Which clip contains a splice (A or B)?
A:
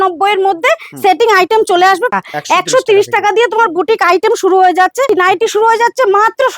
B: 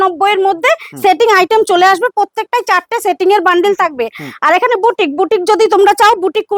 A